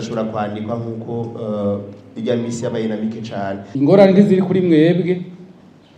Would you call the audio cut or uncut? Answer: cut